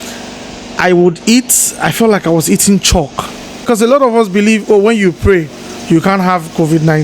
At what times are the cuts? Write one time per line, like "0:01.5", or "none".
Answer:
0:03.6